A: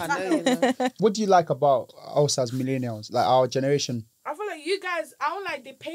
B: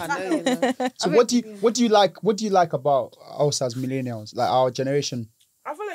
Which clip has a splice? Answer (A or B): A